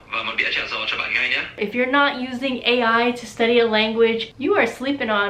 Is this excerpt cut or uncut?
cut